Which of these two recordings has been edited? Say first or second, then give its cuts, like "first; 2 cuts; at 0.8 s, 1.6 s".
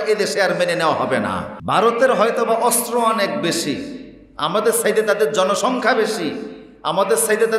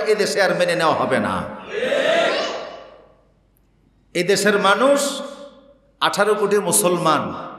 first; 1 cut; at 1.5 s